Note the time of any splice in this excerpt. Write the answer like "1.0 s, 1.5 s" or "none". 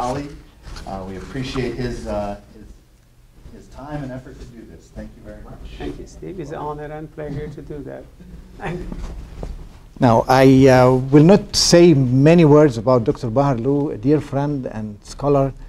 5.4 s